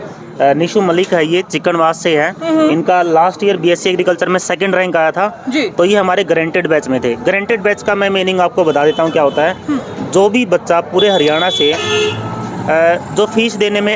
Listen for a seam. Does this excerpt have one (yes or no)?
no